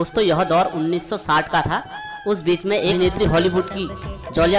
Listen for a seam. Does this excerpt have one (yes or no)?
yes